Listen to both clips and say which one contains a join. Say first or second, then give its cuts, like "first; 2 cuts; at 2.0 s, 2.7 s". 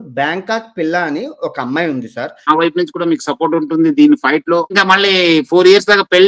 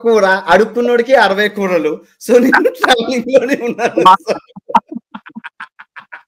first; 2 cuts; at 2.5 s, 4.7 s